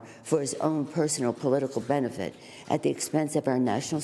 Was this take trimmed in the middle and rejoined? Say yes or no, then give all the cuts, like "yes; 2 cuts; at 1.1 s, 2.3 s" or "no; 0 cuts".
no; 0 cuts